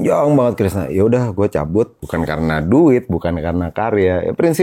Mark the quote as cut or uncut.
cut